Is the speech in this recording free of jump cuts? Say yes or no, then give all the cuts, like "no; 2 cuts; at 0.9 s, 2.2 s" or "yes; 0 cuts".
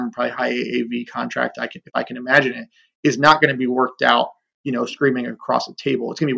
yes; 0 cuts